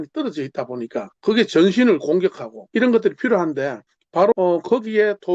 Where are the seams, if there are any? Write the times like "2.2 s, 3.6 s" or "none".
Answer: 1.1 s, 2.5 s, 4.3 s